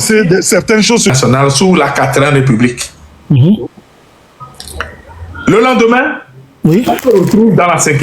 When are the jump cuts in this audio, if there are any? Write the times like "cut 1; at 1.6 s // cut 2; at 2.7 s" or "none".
cut 1; at 1.1 s